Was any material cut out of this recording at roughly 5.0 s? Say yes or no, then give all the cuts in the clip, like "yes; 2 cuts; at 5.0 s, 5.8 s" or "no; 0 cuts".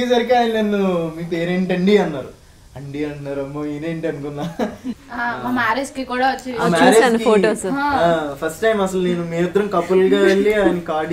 yes; 1 cut; at 5.0 s